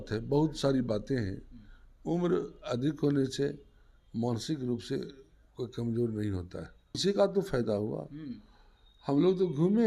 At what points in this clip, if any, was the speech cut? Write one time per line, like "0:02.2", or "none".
0:07.0